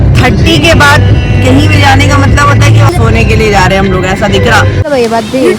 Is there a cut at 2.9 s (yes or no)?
yes